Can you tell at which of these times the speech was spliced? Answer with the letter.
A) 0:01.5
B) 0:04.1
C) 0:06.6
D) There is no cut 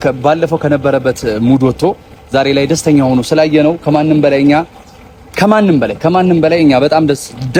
D